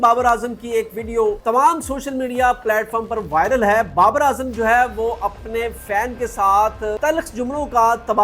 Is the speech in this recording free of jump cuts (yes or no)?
no